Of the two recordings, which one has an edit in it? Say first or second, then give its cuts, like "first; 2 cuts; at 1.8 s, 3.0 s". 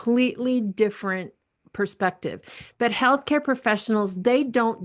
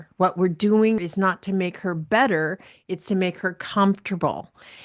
second; 1 cut; at 1.1 s